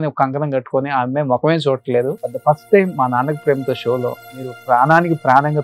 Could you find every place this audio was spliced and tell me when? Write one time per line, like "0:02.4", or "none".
0:02.3
0:04.6